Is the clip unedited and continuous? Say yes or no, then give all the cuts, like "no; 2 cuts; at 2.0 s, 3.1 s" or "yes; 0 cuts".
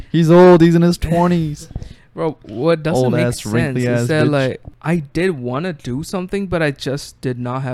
no; 1 cut; at 4.7 s